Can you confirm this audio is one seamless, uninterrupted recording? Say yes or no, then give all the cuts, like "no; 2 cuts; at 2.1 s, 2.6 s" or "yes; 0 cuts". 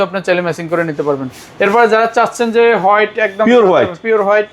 yes; 0 cuts